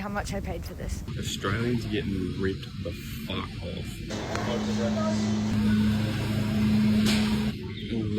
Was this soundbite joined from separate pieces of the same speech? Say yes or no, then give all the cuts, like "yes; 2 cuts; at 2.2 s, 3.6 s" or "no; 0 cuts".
yes; 1 cut; at 1.0 s